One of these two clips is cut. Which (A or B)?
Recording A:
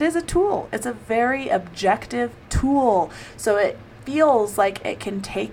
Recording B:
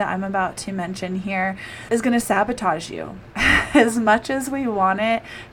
B